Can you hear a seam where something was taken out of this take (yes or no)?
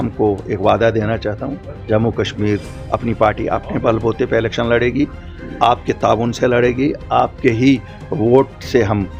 no